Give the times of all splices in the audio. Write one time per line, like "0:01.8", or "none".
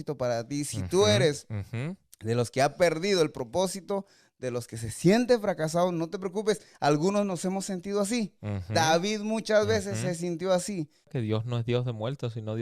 0:11.1